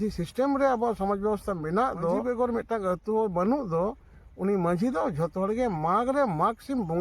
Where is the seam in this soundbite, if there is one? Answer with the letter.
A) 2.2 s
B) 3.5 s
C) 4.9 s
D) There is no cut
A